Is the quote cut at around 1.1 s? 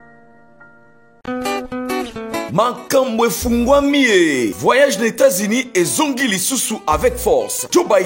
yes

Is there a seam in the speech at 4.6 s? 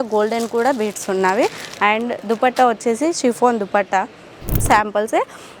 yes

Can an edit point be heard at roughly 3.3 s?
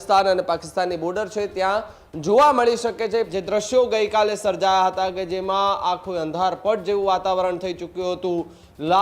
yes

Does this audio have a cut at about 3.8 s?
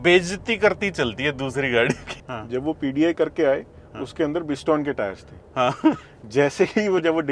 no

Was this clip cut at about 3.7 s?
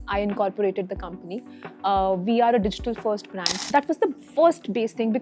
yes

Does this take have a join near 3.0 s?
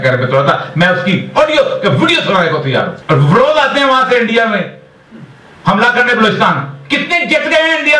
yes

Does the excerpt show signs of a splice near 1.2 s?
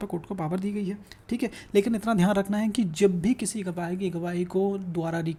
no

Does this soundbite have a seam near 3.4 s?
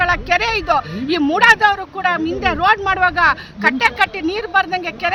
no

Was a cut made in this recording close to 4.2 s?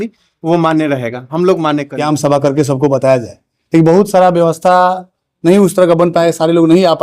no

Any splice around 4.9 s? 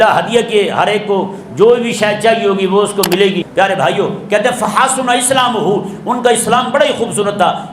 no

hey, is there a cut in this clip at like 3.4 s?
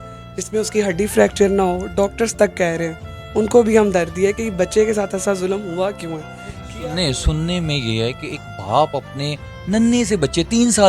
no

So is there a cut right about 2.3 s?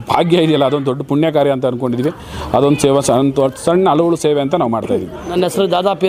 no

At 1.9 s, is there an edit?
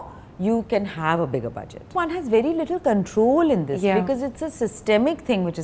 yes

